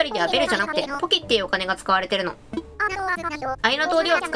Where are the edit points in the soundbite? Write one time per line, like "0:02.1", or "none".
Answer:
0:02.4

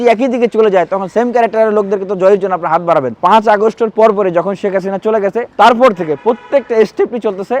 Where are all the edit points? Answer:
0:03.1

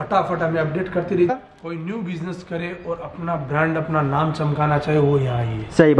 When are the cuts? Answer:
0:01.3

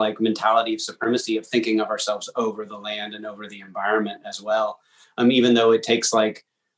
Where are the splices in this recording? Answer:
none

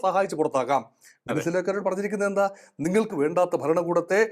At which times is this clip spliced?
none

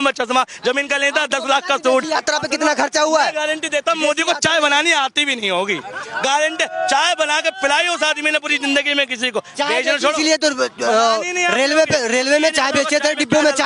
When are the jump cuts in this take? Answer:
none

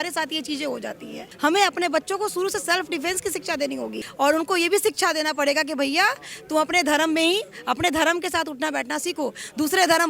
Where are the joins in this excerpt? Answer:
0:01.2
0:04.0

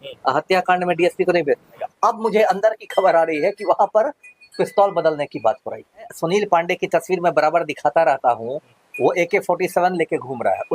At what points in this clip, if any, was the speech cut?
0:01.9
0:06.1

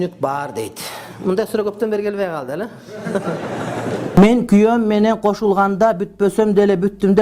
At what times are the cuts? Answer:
0:04.0

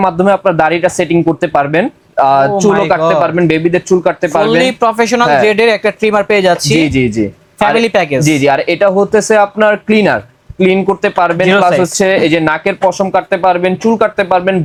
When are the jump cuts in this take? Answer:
none

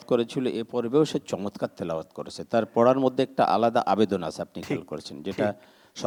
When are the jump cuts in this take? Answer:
none

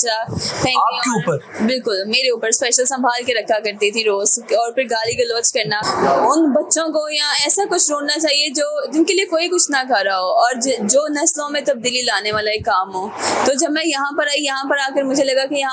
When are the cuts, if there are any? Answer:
0:05.8

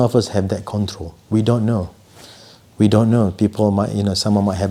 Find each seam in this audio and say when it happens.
none

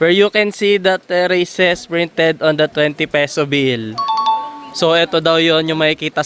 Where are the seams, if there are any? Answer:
none

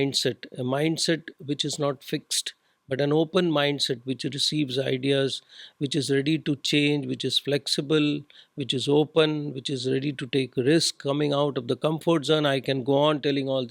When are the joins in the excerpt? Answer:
none

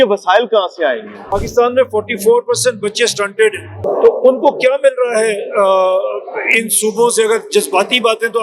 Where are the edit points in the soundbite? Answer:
0:01.3
0:03.8

